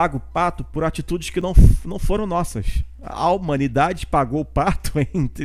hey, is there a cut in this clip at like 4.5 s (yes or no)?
no